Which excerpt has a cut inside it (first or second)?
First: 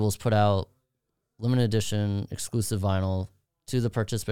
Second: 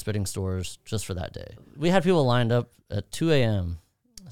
second